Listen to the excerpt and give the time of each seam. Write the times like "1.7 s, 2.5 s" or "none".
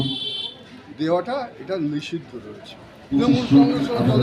3.2 s